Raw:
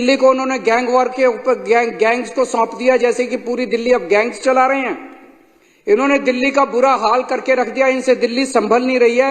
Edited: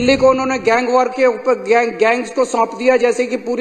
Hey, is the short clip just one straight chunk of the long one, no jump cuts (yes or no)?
yes